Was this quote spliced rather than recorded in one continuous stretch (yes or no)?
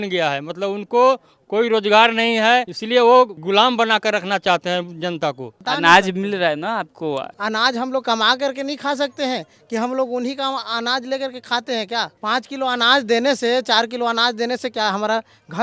yes